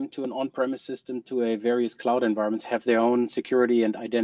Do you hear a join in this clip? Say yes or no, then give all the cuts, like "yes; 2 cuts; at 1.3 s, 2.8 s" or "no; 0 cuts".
no; 0 cuts